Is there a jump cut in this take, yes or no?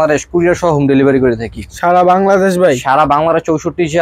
no